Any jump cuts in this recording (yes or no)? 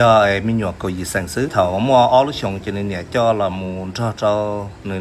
yes